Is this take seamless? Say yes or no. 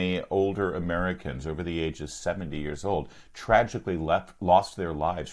yes